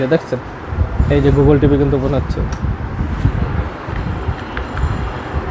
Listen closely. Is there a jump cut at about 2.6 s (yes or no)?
no